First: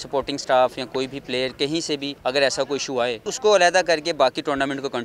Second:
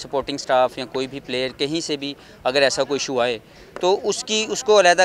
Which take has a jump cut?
first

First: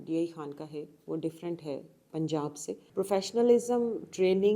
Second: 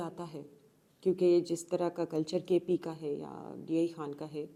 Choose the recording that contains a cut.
first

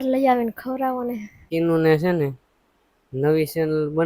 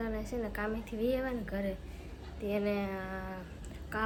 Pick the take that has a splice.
first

